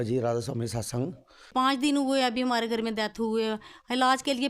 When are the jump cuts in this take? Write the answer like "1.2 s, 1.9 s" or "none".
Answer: 1.3 s